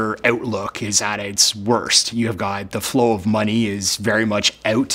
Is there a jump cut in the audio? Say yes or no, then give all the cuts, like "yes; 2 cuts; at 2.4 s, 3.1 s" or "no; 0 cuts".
yes; 2 cuts; at 2.0 s, 3.6 s